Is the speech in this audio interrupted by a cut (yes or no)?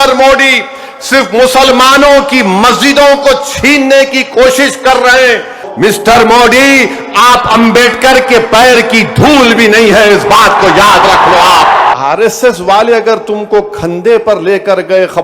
yes